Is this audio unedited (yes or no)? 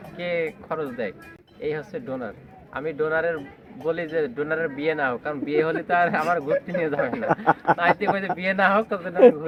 yes